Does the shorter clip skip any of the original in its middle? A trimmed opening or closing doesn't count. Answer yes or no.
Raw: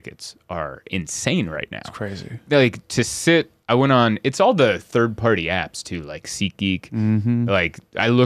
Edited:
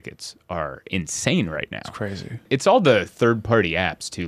yes